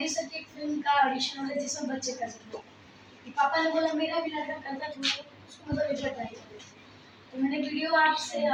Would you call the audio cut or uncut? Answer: uncut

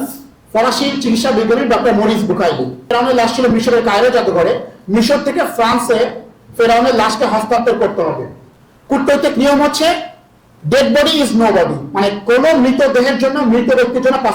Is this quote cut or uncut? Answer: cut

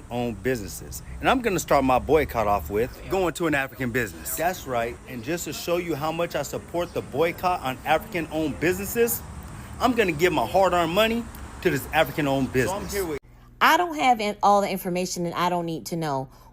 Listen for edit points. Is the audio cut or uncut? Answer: cut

